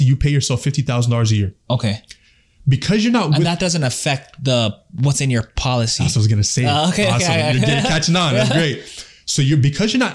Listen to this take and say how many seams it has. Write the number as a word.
zero